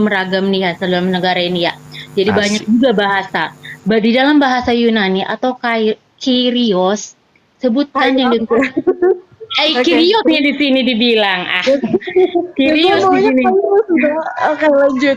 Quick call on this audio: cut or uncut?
uncut